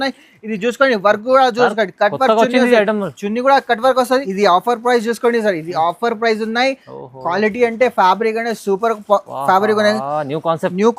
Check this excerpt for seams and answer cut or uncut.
cut